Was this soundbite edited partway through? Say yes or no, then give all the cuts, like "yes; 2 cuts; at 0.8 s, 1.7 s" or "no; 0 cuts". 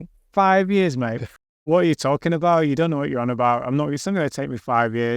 yes; 1 cut; at 1.3 s